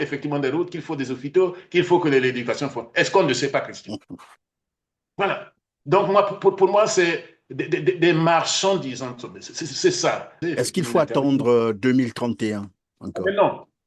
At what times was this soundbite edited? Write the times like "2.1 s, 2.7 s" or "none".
10.4 s